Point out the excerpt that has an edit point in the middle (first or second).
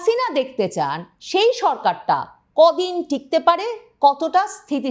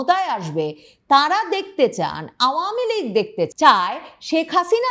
second